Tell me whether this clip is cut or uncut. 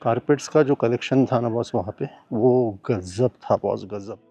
uncut